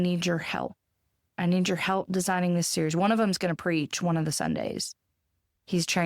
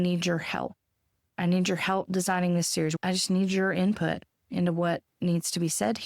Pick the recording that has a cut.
second; 1 cut; at 3.0 s

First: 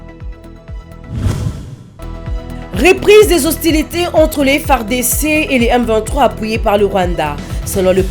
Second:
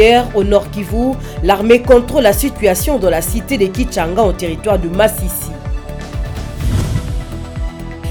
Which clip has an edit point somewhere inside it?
first; 1 cut; at 1.0 s

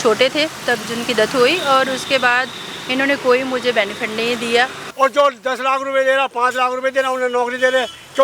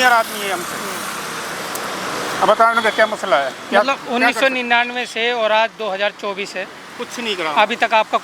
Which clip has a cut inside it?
first; 1 cut; at 4.8 s

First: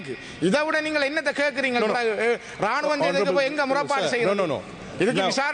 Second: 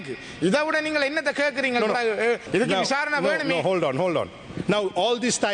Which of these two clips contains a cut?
second; 1 cut; at 2.4 s

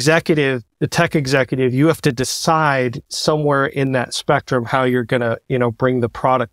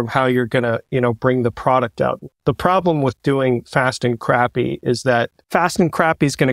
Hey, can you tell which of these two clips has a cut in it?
second; 1 cut; at 5.4 s

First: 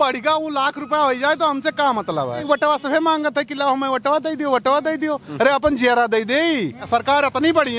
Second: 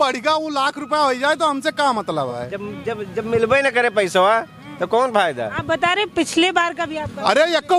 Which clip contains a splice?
first; 2 cuts; at 2.4 s, 6.8 s

